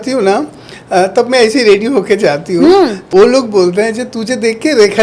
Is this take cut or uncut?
cut